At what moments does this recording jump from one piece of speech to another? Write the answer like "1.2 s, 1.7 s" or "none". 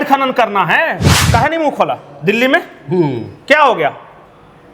1.1 s